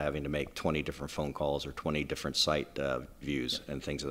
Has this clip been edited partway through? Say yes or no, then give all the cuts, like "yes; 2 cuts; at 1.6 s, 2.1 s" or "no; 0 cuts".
no; 0 cuts